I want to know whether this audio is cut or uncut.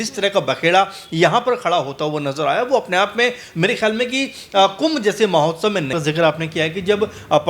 cut